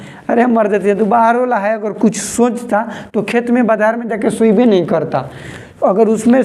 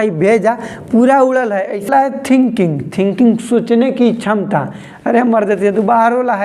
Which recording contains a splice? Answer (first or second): second